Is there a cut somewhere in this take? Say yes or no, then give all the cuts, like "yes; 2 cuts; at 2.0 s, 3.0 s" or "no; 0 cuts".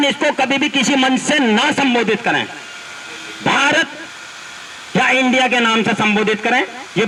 no; 0 cuts